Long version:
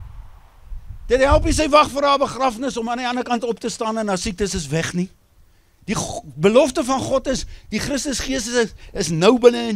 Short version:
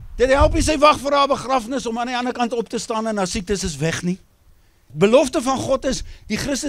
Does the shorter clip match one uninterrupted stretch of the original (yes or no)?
no